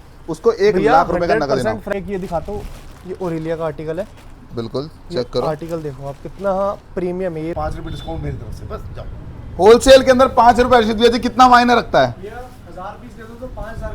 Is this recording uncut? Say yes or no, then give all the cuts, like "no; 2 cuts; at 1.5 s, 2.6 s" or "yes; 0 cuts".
no; 2 cuts; at 1.9 s, 7.5 s